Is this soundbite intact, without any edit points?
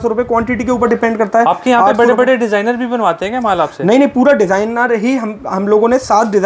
yes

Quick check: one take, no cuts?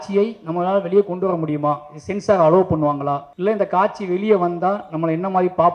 no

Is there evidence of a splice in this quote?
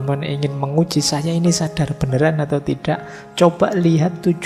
no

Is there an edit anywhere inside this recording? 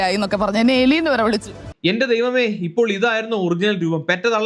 yes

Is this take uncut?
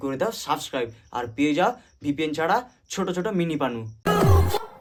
yes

